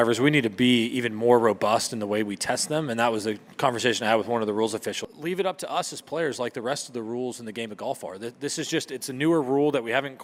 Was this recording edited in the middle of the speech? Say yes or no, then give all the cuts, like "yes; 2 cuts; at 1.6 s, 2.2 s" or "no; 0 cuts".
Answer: no; 0 cuts